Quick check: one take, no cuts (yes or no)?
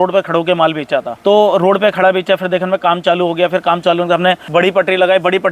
no